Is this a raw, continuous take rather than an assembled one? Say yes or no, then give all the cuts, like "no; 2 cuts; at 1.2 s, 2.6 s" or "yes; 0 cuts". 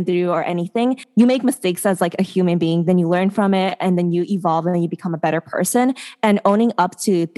no; 1 cut; at 1.0 s